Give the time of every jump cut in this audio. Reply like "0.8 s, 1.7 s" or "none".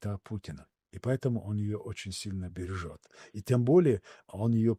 none